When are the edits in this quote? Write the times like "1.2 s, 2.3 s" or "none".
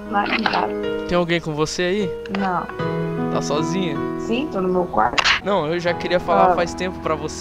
5.3 s